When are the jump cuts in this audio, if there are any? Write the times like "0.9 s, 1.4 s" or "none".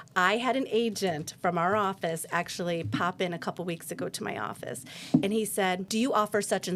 5.8 s